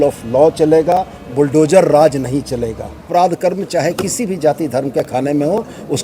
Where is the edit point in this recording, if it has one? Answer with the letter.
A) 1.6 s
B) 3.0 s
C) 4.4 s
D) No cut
B